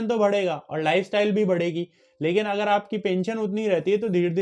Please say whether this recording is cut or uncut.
uncut